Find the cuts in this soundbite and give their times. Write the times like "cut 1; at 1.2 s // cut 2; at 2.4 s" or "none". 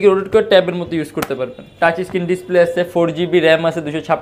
cut 1; at 1.6 s